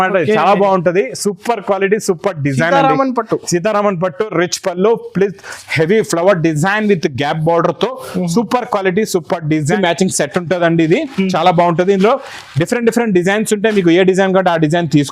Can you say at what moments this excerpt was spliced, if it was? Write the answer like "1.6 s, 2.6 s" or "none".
9.8 s